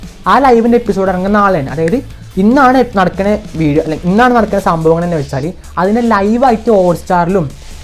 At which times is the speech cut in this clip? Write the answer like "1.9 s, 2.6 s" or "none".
none